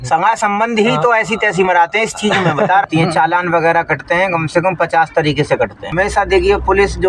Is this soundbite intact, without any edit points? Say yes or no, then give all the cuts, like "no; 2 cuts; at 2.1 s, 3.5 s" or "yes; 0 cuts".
no; 2 cuts; at 2.8 s, 5.9 s